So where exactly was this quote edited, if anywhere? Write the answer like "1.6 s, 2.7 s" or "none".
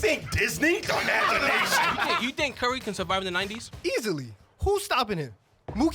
2.2 s, 4.0 s